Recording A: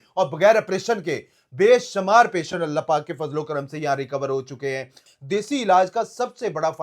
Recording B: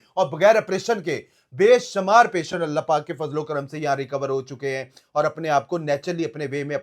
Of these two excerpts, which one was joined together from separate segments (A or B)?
A